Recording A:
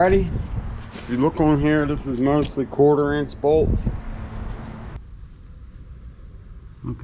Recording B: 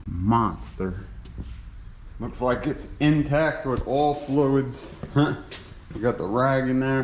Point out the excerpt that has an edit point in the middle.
A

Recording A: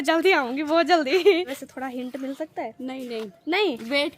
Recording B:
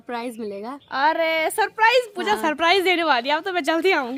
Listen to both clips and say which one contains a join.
A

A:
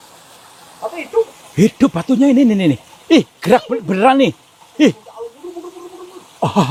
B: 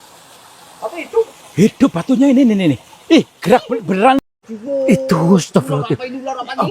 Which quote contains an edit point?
B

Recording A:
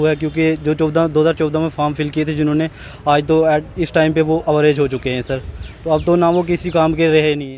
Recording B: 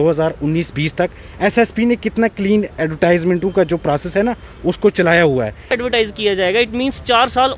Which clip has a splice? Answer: B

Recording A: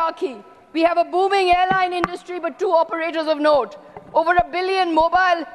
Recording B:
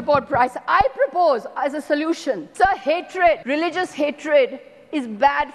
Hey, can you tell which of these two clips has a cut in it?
B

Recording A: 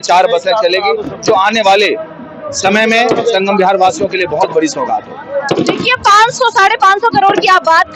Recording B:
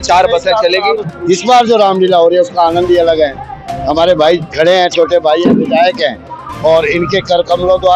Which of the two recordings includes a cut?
B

